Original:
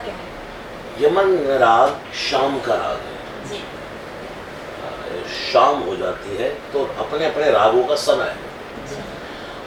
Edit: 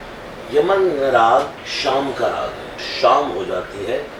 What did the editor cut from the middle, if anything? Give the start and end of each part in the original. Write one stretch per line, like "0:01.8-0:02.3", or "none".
0:03.3-0:05.3

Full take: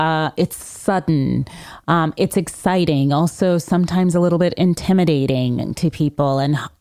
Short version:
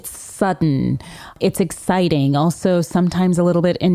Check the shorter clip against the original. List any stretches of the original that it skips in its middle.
0:01.8-0:02.1

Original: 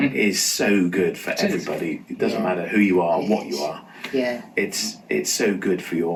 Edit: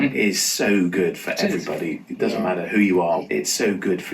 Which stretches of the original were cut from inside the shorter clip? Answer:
0:03.2-0:05.0

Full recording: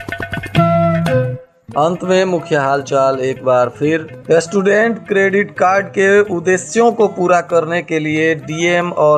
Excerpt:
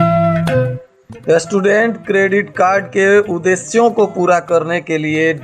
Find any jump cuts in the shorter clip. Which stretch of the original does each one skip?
0:01.7-0:04.1

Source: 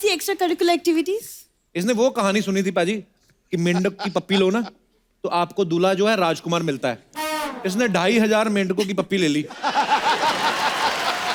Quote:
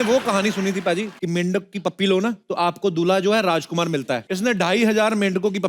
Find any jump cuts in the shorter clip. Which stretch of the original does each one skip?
0:03.0-0:03.4
0:04.7-0:05.2
0:07.0-0:07.6

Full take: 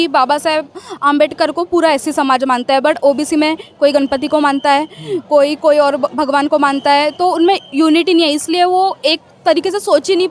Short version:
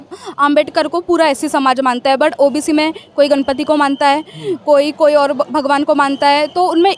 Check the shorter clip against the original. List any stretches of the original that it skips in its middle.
none

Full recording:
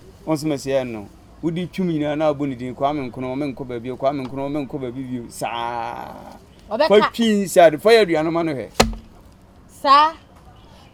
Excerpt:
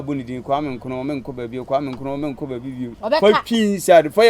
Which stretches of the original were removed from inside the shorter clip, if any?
0:05.3-0:06.6

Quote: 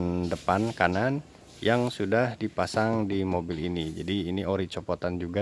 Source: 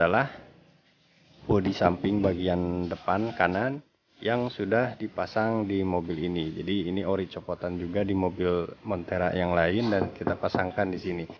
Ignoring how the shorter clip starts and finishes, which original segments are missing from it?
none

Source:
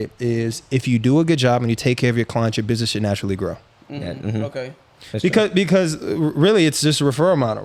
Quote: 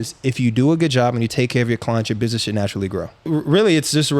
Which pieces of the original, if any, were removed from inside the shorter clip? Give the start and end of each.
0:03.7-0:06.1

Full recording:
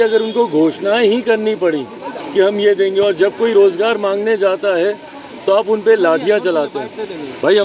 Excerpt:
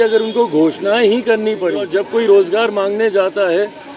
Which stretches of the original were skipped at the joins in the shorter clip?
0:01.8-0:03.1

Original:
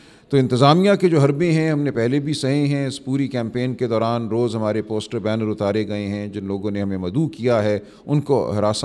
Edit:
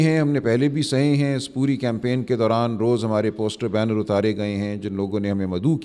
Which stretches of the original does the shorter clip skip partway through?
none

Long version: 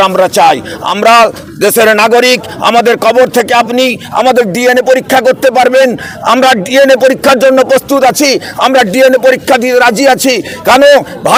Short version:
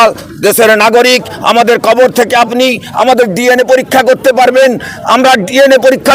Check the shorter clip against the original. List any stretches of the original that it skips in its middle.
none

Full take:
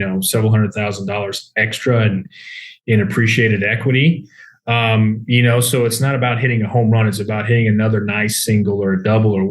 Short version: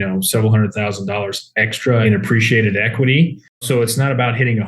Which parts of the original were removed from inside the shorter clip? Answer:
0:02.0-0:02.9
0:04.5-0:05.7

